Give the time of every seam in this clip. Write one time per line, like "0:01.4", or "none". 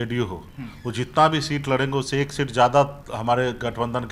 none